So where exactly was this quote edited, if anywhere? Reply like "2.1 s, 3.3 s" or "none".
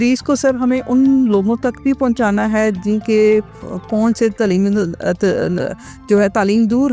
none